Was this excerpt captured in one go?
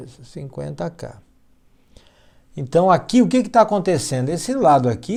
yes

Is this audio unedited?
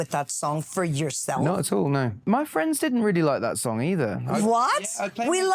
no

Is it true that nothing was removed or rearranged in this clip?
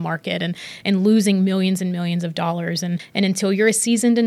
no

